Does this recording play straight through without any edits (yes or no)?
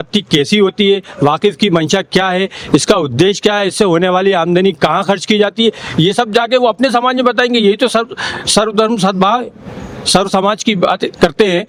yes